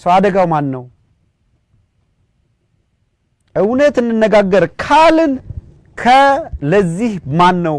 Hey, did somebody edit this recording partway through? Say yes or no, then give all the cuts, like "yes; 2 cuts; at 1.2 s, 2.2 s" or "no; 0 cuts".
no; 0 cuts